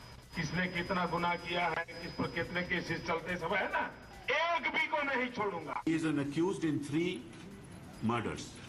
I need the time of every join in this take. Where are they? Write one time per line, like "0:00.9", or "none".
0:04.1
0:05.9